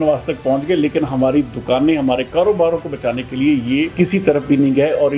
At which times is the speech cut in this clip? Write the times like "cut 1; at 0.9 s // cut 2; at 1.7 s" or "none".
cut 1; at 3.9 s